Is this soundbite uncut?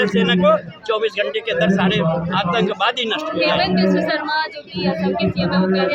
yes; 0 cuts

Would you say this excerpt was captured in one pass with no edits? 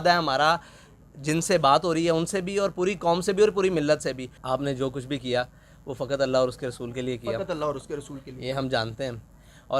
no; 1 cut; at 4.3 s

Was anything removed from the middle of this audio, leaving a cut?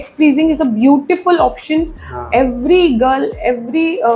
no; 0 cuts

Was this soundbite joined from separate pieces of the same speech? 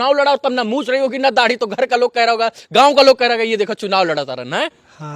no; 0 cuts

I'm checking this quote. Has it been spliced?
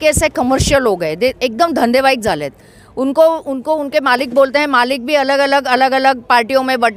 no; 0 cuts

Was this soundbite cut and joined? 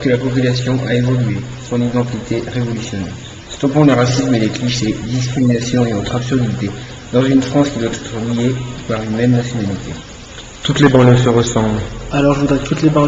yes; 1 cut; at 6.6 s

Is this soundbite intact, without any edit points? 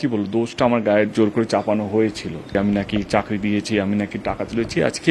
no; 1 cut; at 2.6 s

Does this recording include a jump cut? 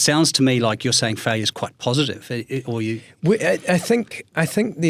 no; 0 cuts

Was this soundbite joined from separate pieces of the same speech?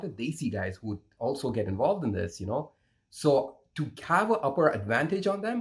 no; 0 cuts

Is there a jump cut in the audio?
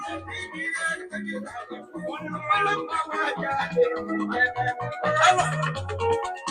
no; 0 cuts

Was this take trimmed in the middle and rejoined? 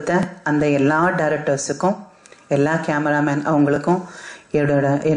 no; 0 cuts

